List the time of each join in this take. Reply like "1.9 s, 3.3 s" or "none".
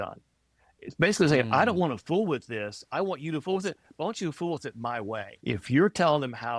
5.3 s